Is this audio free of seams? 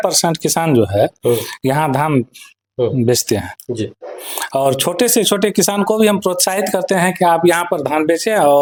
yes; 0 cuts

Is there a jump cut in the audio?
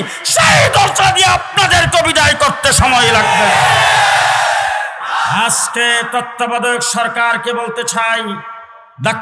yes; 1 cut; at 5.0 s

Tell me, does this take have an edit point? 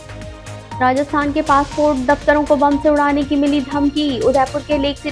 no; 0 cuts

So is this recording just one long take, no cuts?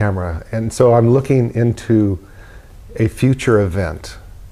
no; 1 cut; at 1.2 s

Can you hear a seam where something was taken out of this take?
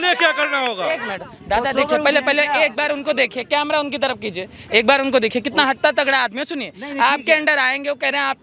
yes; 1 cut; at 1.1 s

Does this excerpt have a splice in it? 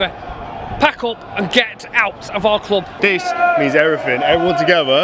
no; 0 cuts

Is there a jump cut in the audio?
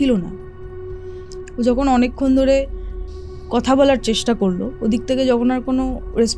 no; 0 cuts

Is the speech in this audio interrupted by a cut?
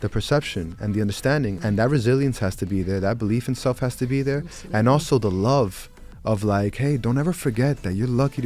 yes; 1 cut; at 1.6 s

